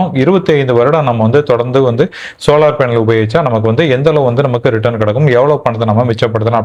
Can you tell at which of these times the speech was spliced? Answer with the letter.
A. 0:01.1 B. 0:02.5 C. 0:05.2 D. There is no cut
D